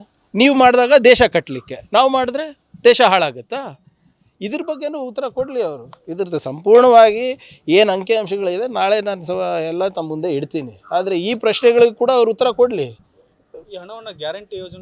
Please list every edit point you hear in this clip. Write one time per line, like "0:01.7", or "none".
0:13.7

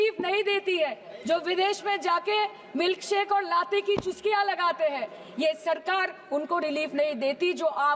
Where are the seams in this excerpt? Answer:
none

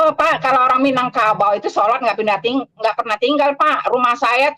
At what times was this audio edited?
none

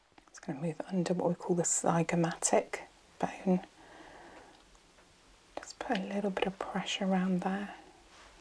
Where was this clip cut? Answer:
none

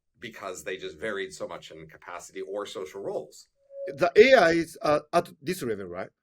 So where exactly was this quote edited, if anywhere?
0:03.9

